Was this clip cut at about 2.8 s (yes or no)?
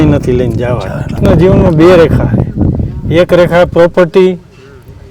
no